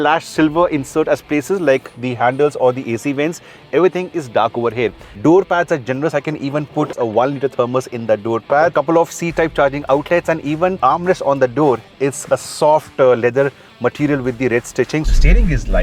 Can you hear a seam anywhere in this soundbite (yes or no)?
yes